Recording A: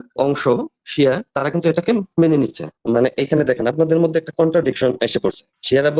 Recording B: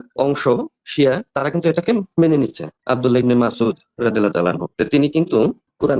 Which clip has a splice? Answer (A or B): B